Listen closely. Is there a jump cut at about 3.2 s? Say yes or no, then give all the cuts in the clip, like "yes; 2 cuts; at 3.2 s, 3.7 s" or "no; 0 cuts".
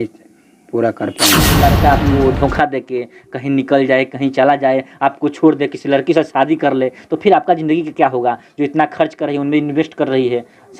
no; 1 cut; at 1.6 s